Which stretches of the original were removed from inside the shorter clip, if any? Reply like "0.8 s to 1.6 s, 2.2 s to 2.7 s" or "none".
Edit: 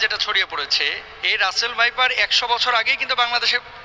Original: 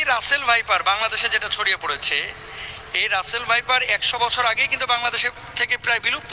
2.4 s to 2.8 s